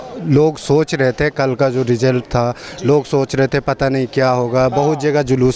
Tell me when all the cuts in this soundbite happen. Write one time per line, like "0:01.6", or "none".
none